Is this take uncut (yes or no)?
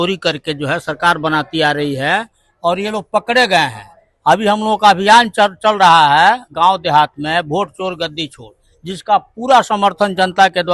yes